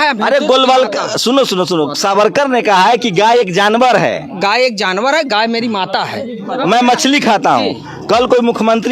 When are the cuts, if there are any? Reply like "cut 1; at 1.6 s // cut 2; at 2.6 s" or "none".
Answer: cut 1; at 6.5 s